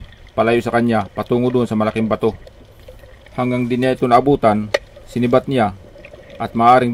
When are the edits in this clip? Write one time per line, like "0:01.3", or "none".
none